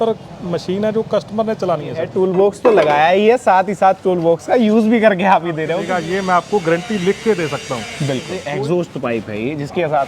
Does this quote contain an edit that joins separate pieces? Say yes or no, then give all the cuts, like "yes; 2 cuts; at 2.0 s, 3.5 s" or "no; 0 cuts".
yes; 3 cuts; at 2.0 s, 5.8 s, 8.0 s